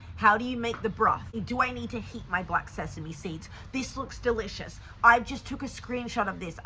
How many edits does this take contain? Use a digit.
1